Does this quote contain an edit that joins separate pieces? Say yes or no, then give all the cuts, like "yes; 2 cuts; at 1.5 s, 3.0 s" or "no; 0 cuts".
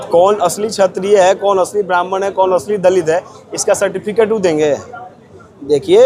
no; 0 cuts